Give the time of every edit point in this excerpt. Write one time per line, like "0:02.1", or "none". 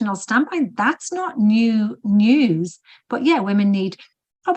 none

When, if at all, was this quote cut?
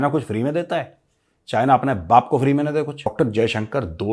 0:03.1

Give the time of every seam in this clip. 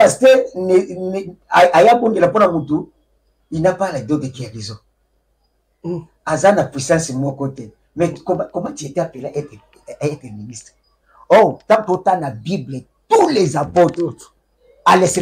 none

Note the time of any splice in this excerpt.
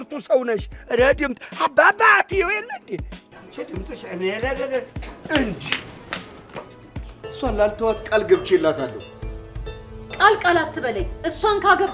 0:07.2

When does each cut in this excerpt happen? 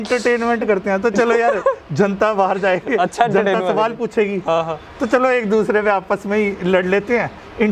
none

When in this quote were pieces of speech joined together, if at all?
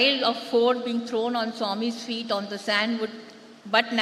none

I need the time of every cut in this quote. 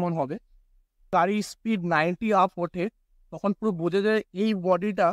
0:01.1

